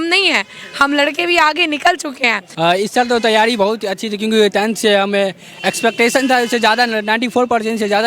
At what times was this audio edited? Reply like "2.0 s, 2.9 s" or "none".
2.4 s